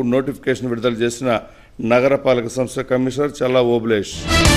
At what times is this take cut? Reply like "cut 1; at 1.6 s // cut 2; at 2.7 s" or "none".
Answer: none